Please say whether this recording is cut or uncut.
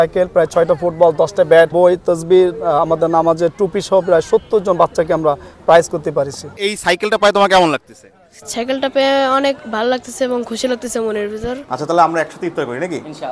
cut